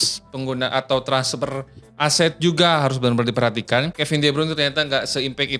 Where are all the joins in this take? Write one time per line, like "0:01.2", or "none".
0:04.0